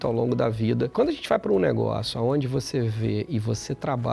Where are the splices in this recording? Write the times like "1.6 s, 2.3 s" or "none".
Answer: 0.9 s